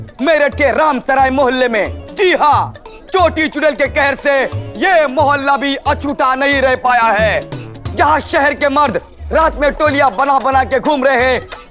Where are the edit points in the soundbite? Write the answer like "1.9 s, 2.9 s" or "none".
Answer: none